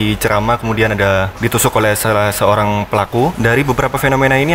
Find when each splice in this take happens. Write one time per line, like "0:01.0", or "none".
0:01.3
0:03.3